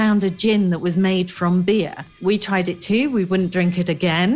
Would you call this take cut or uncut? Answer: cut